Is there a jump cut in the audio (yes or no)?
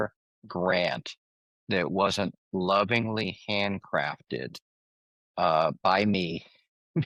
no